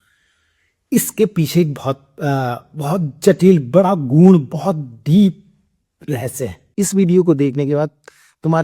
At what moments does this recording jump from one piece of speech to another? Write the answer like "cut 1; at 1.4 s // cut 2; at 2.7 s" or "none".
cut 1; at 6.7 s

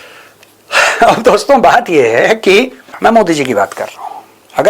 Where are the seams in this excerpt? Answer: cut 1; at 2.9 s

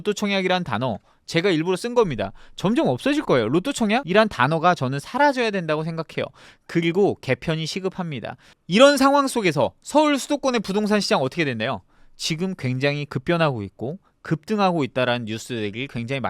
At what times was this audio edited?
cut 1; at 4.1 s // cut 2; at 8.6 s

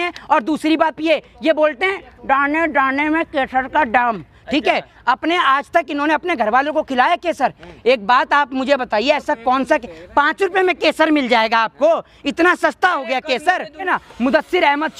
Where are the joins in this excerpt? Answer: cut 1; at 13.9 s

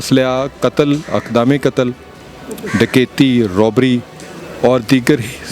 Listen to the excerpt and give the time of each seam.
none

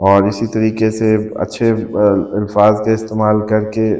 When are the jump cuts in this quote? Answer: none

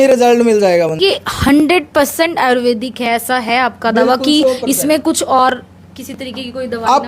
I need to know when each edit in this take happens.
cut 1; at 0.9 s

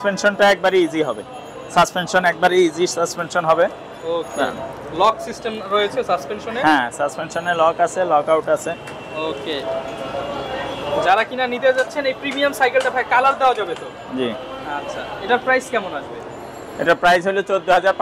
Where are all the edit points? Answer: none

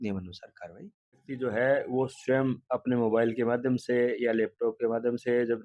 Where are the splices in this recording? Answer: cut 1; at 1.3 s

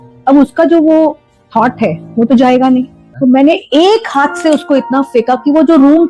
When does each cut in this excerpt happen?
cut 1; at 3.0 s

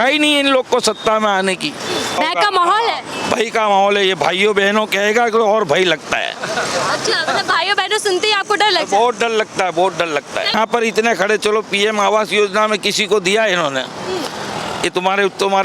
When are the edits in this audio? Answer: cut 1; at 2.2 s // cut 2; at 10.5 s

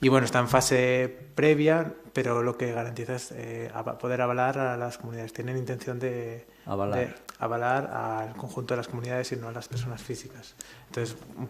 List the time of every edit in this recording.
cut 1; at 4.4 s

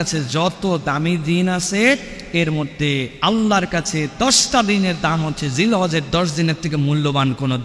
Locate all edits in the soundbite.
none

